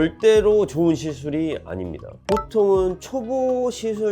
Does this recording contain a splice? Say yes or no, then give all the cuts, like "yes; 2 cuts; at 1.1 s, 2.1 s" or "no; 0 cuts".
yes; 1 cut; at 2.2 s